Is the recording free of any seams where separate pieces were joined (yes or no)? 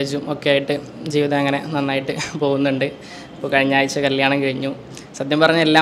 yes